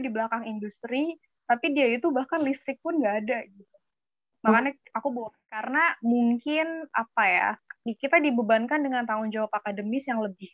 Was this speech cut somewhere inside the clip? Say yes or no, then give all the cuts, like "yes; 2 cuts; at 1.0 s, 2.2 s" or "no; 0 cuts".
yes; 1 cut; at 5.7 s